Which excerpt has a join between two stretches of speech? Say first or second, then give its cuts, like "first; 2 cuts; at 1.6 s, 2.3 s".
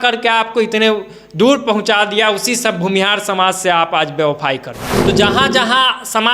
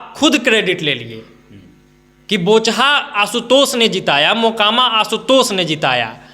first; 1 cut; at 4.8 s